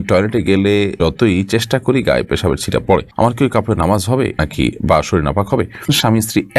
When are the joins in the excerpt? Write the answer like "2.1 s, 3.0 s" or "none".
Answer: 1.0 s, 3.1 s, 4.4 s, 5.9 s